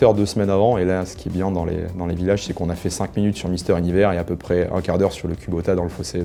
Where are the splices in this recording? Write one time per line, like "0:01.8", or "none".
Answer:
none